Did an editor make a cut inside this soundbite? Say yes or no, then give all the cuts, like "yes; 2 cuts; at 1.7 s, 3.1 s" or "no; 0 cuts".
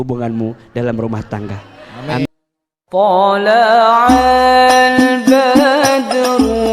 yes; 1 cut; at 2.2 s